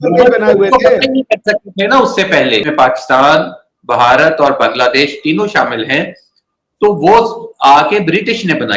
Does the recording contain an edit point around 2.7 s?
yes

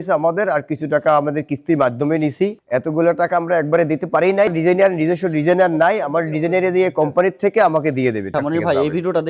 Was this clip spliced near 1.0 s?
no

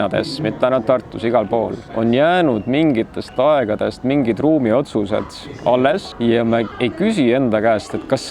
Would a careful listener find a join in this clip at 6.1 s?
yes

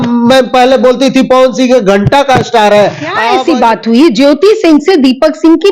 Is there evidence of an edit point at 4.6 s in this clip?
no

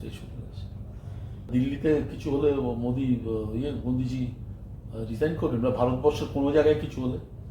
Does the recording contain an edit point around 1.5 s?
yes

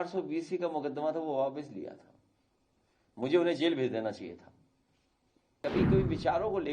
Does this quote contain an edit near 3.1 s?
no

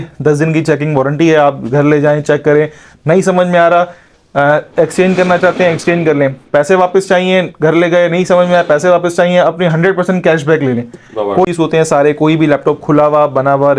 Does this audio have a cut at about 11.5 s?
yes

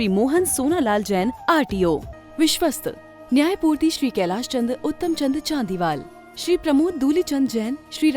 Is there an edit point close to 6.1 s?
no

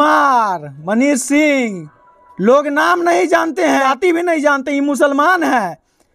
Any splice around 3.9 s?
yes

